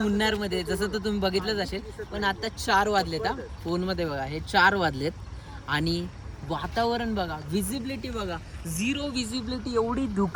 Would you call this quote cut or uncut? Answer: uncut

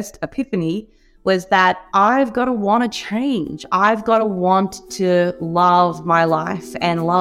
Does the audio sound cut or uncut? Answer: uncut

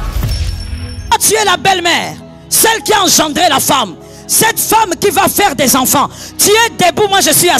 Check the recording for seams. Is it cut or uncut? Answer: uncut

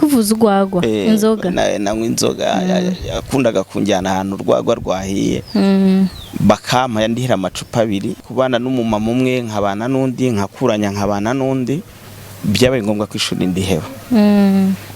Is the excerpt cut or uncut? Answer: cut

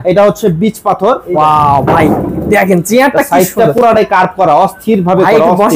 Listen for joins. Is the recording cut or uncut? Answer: cut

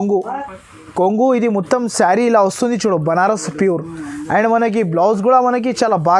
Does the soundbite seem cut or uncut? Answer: uncut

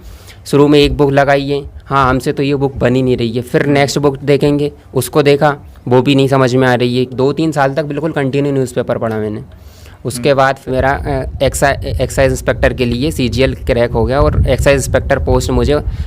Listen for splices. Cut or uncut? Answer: cut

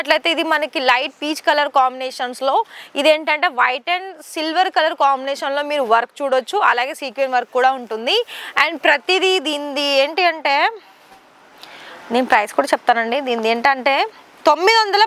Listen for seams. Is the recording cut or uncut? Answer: uncut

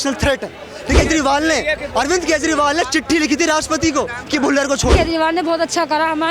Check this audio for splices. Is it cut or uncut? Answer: cut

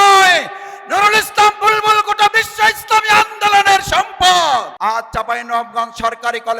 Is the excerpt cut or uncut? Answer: cut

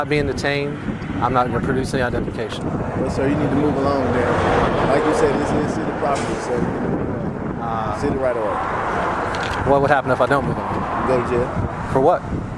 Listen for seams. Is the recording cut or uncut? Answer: uncut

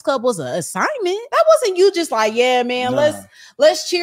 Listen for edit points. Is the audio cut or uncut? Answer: cut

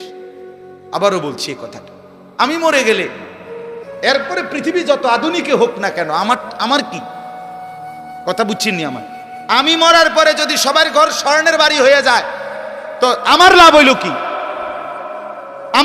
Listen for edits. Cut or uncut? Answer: uncut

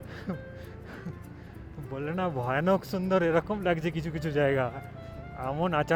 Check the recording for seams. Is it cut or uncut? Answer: uncut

